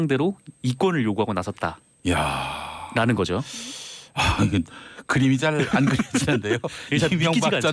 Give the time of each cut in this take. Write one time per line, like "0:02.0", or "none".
none

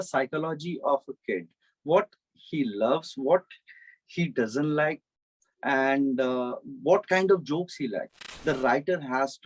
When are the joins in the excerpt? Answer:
0:08.3

